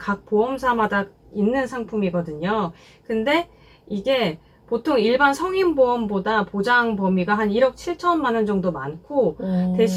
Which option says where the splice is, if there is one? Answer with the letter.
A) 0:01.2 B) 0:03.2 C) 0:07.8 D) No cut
D